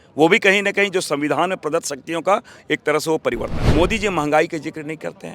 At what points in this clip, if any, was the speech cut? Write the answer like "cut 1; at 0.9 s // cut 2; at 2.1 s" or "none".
cut 1; at 3.5 s